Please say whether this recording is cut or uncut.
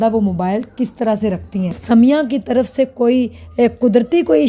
cut